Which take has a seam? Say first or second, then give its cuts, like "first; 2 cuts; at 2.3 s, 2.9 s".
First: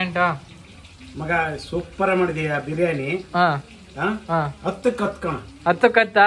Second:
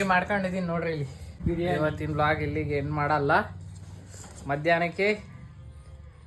second; 1 cut; at 1.4 s